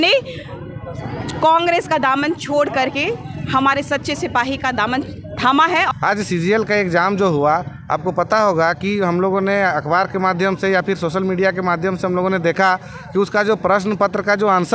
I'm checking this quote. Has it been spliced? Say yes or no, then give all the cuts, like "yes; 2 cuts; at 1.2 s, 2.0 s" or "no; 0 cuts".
yes; 1 cut; at 5.9 s